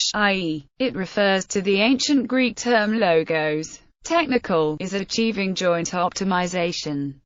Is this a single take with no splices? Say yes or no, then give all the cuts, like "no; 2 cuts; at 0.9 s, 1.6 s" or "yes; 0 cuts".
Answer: yes; 0 cuts